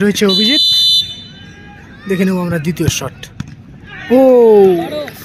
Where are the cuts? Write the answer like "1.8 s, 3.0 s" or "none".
2.6 s, 4.4 s